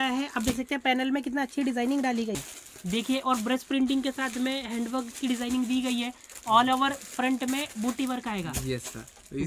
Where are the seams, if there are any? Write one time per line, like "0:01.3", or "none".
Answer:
0:02.3